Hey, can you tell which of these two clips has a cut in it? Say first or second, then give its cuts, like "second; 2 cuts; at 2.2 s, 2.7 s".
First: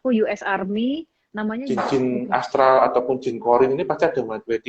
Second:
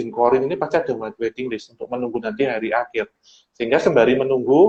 first; 1 cut; at 1.6 s